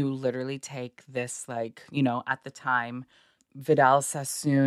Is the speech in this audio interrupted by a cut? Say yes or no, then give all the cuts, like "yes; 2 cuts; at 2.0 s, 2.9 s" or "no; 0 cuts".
no; 0 cuts